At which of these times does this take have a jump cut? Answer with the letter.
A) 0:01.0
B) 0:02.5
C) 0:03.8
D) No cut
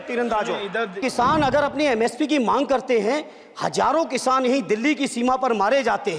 A